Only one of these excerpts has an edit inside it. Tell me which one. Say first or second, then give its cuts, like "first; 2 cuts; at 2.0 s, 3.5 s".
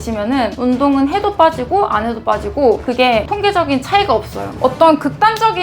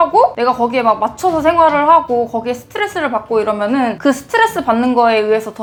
first; 1 cut; at 4.6 s